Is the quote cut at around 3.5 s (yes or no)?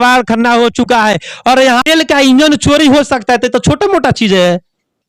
no